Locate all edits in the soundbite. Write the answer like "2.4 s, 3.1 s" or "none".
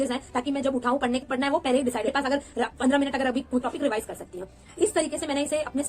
1.2 s, 2.1 s, 3.6 s